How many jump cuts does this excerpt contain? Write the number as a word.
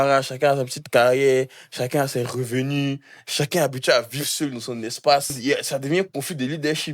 one